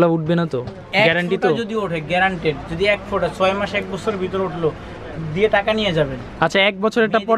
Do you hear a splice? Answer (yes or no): no